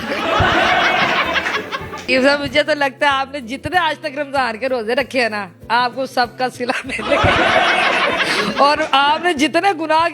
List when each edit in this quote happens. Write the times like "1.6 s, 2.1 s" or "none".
2.1 s